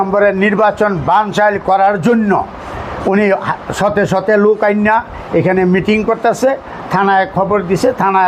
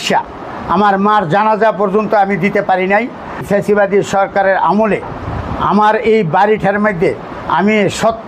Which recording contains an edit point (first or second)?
second